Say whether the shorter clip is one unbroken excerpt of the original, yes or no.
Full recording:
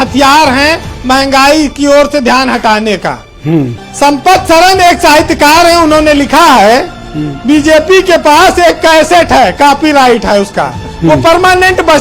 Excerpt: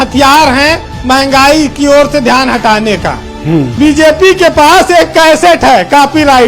no